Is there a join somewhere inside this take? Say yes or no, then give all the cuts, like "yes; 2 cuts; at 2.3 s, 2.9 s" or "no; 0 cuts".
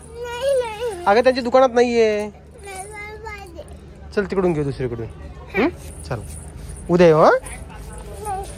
no; 0 cuts